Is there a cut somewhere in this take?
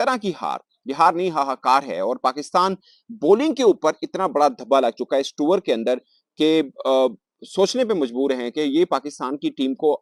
no; 0 cuts

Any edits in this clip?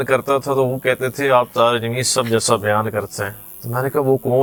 no; 0 cuts

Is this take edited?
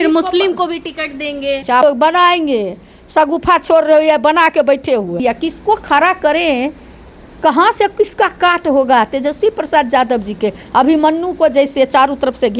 yes; 2 cuts; at 1.8 s, 5.2 s

